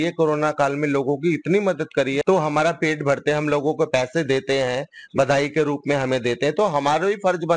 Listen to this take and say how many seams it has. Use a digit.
1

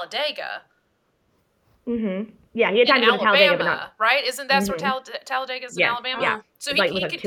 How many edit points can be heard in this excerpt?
0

